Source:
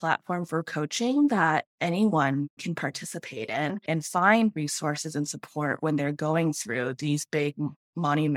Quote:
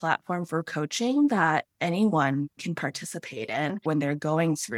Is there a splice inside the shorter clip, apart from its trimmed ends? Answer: yes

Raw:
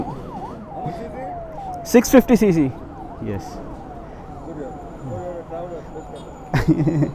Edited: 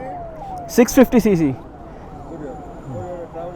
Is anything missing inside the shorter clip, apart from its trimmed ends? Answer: yes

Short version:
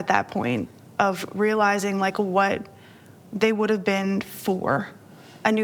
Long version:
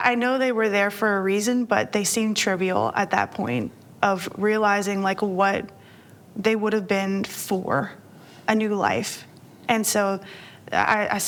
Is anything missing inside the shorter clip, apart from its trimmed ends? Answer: no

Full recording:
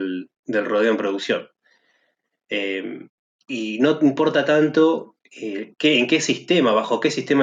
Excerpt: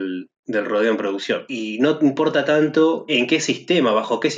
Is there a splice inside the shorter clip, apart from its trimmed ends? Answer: yes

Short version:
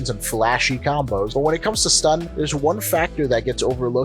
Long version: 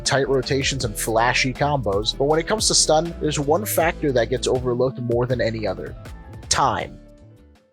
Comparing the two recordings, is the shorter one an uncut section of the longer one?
no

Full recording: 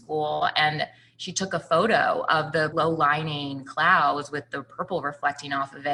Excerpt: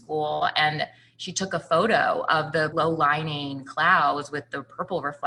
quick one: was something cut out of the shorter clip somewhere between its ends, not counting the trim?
no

